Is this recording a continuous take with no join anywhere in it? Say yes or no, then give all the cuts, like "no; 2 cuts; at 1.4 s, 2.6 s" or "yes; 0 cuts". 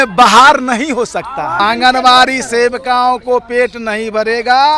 no; 1 cut; at 1.6 s